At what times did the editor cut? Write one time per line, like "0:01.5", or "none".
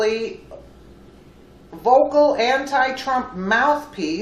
0:02.8